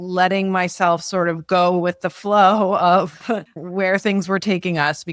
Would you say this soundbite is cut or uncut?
cut